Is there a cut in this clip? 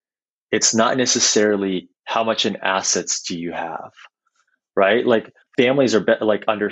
yes; 1 cut; at 5.4 s

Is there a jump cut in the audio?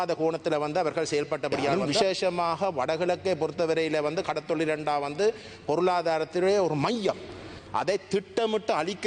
yes; 1 cut; at 1.8 s

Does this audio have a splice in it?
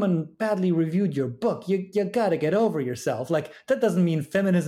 no; 0 cuts

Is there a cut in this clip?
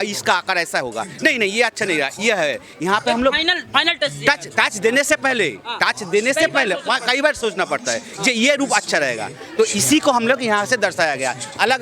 no; 0 cuts

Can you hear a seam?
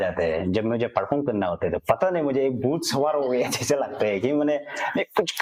no; 0 cuts

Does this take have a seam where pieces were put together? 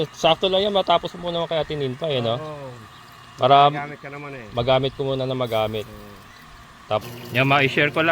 yes; 1 cut; at 7.0 s

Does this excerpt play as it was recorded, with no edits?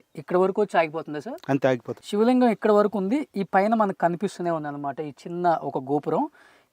no; 1 cut; at 1.9 s

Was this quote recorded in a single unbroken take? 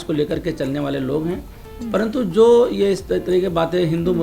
yes; 0 cuts

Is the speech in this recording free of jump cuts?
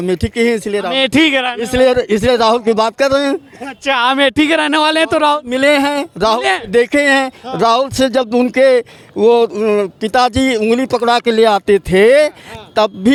yes; 0 cuts

